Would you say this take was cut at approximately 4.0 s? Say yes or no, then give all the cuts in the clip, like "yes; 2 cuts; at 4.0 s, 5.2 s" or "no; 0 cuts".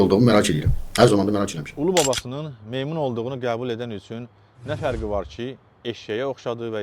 no; 1 cut; at 1.7 s